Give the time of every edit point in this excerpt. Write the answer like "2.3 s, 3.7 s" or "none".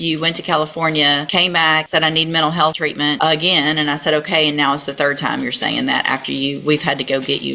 1.7 s, 2.8 s